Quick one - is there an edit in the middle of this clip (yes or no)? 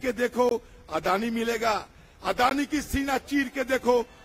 no